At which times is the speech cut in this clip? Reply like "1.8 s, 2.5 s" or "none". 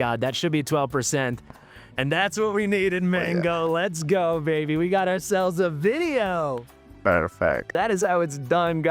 7.7 s